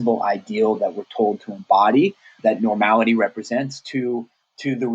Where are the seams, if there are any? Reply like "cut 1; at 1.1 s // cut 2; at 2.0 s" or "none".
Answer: cut 1; at 2.4 s